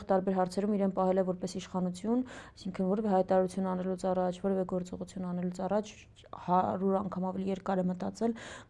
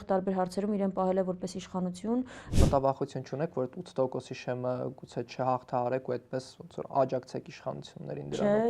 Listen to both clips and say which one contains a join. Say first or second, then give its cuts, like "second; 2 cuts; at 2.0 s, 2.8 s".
second; 1 cut; at 2.6 s